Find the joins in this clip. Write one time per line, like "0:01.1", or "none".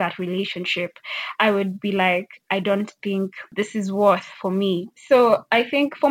none